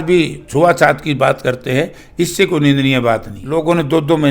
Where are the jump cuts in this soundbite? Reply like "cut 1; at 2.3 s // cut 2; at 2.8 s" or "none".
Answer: cut 1; at 3.3 s